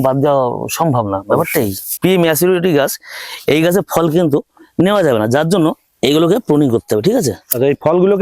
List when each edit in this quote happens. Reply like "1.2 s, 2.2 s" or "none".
1.9 s